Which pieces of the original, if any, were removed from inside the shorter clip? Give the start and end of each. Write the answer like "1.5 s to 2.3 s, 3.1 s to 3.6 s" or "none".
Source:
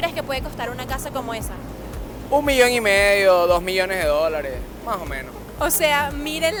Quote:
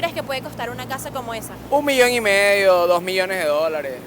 1.5 s to 2.1 s